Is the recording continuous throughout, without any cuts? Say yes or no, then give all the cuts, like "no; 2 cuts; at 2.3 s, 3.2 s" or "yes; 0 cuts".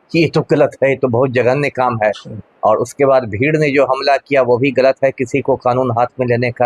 yes; 0 cuts